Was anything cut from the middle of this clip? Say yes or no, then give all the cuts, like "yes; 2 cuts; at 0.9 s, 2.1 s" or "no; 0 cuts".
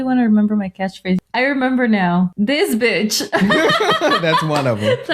yes; 2 cuts; at 1.2 s, 2.3 s